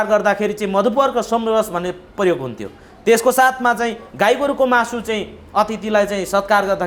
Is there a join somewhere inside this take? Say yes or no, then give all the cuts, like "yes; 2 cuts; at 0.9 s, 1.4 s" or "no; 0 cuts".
no; 0 cuts